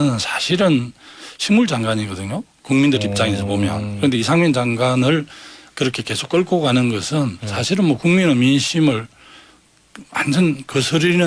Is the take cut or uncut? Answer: uncut